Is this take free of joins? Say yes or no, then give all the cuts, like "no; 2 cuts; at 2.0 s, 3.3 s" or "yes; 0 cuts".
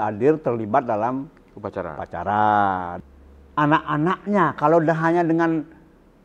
no; 1 cut; at 2.9 s